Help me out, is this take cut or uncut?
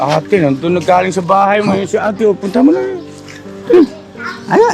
uncut